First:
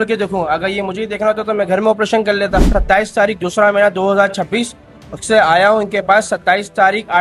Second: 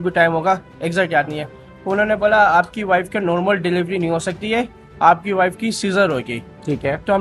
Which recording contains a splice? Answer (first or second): first